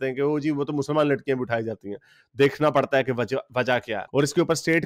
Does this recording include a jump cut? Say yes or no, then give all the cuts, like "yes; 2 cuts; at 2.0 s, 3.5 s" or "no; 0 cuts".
no; 0 cuts